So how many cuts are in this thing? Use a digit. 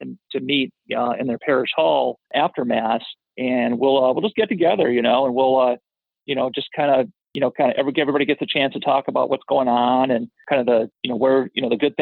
3